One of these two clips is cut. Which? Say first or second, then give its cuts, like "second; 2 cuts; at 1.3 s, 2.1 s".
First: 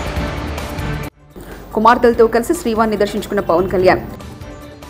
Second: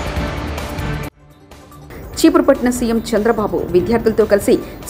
first; 1 cut; at 1.2 s